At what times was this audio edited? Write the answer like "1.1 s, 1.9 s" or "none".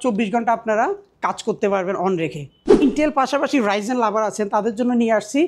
2.8 s